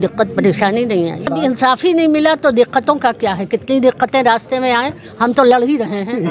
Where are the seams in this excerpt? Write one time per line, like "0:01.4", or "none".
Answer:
0:01.3